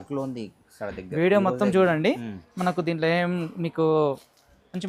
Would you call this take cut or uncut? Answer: uncut